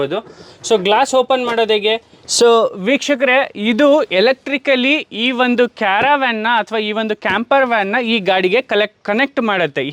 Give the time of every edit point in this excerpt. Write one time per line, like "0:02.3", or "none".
0:02.2